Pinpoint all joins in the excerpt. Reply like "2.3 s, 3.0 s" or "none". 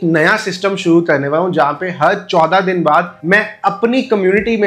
3.1 s